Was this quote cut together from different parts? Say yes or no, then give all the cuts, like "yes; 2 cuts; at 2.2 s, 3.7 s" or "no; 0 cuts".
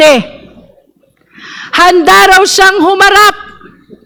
no; 0 cuts